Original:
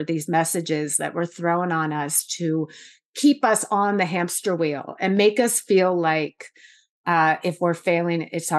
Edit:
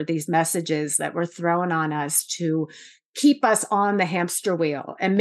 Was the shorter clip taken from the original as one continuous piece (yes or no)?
yes